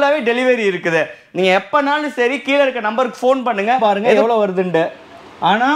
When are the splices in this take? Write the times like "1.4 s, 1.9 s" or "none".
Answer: 3.8 s

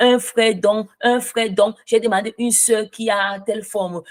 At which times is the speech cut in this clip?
none

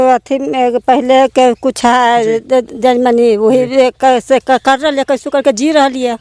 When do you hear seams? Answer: none

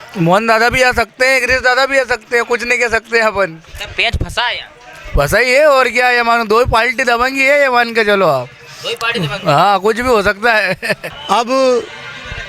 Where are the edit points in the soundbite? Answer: 11.1 s

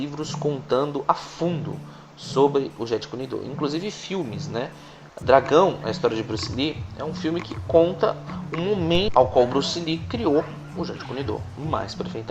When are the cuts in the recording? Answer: 6.9 s

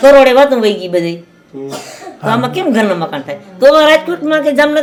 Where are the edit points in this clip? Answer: none

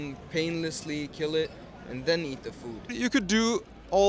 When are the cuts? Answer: 2.9 s

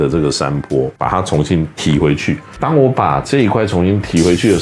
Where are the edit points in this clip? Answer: 0.9 s, 2.5 s

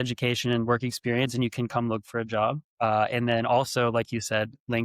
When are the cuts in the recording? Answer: 2.7 s

